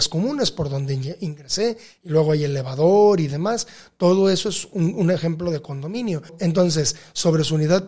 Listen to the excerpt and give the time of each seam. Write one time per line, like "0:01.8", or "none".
0:06.3